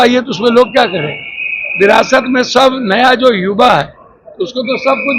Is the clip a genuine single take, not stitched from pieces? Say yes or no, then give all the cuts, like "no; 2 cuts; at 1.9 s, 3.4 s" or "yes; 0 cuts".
yes; 0 cuts